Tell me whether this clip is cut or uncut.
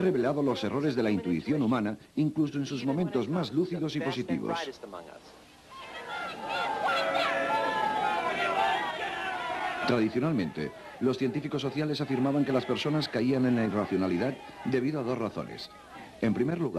cut